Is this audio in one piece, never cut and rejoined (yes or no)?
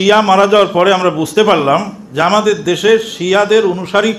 yes